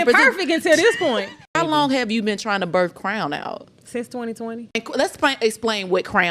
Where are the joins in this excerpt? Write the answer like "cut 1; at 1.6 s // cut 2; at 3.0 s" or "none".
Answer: cut 1; at 1.4 s // cut 2; at 4.8 s

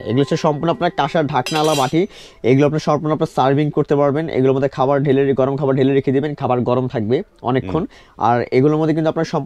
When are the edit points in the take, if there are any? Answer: none

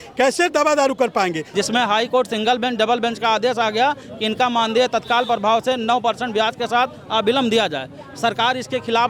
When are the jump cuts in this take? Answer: cut 1; at 1.4 s

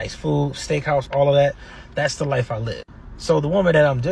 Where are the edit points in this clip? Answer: cut 1; at 1.6 s

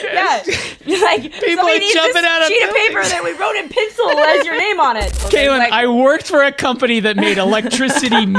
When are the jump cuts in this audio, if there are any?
cut 1; at 5.2 s

